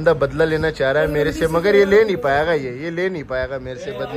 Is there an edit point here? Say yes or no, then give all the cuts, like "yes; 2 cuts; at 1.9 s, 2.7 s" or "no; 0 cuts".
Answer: no; 0 cuts